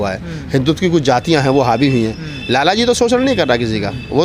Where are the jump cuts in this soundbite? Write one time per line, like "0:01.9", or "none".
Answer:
none